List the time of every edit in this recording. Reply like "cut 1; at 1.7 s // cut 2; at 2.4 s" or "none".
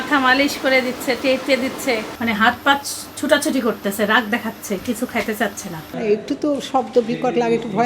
cut 1; at 2.1 s // cut 2; at 5.9 s